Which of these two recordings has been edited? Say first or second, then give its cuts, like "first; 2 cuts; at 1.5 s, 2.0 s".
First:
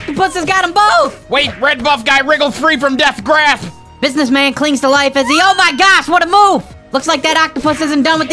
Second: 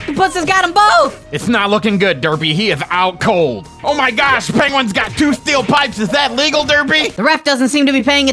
second; 2 cuts; at 1.2 s, 3.7 s